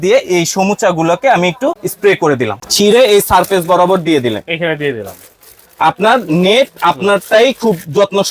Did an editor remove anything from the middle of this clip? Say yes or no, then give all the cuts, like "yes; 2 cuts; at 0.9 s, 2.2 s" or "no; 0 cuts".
yes; 2 cuts; at 1.9 s, 2.6 s